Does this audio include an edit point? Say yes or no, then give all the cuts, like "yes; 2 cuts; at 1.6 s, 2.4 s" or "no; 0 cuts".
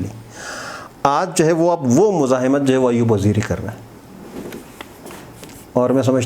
no; 0 cuts